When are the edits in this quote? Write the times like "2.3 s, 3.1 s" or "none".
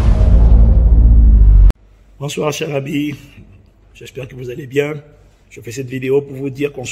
1.7 s